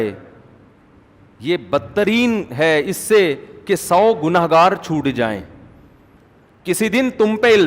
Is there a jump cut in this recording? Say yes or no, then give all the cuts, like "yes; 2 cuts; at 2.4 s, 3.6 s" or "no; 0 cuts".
yes; 1 cut; at 6.2 s